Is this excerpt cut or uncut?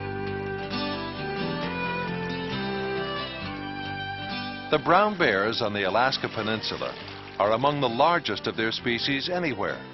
cut